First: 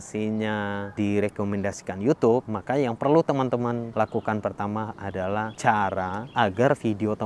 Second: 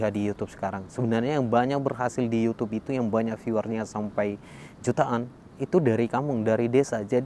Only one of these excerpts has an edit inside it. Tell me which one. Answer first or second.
first